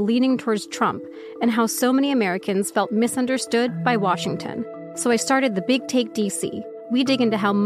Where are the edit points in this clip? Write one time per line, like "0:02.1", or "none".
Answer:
0:04.8
0:06.7